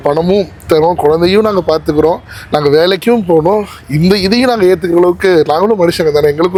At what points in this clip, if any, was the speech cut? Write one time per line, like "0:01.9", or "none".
none